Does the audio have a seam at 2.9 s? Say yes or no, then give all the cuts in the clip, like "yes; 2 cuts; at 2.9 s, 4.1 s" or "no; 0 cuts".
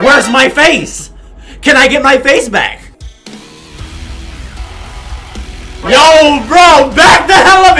yes; 1 cut; at 2.9 s